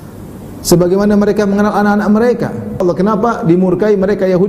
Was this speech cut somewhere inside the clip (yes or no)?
yes